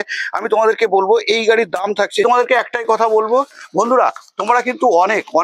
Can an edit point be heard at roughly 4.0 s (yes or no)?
no